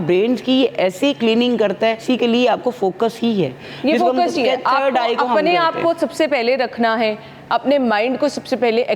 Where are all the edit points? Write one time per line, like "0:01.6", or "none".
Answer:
0:02.0